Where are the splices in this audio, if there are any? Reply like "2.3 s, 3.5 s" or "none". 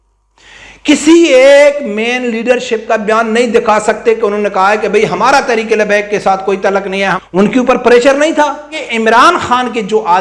7.2 s, 8.8 s

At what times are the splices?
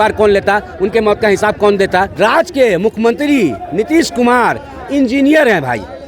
2.1 s

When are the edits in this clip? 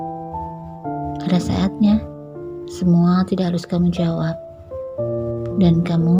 1.2 s

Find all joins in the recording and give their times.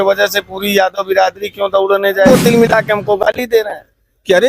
2.3 s

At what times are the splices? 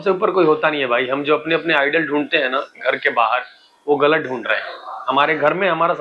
none

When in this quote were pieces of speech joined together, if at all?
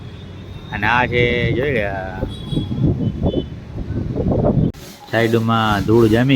4.7 s

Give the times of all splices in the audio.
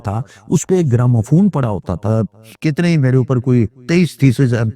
1.9 s

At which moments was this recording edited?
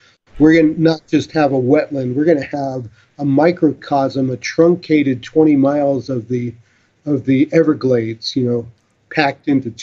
none

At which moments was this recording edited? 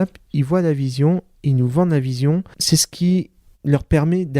2.5 s

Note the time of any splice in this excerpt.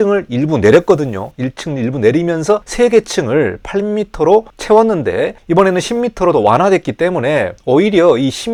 none

